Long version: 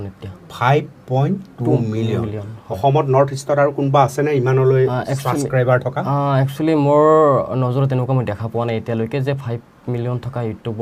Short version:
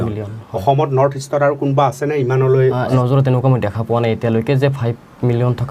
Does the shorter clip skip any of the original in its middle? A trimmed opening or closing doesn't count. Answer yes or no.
yes